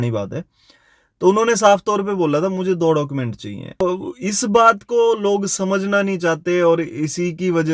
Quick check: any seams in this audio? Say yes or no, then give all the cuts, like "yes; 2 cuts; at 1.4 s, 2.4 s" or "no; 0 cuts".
yes; 1 cut; at 3.8 s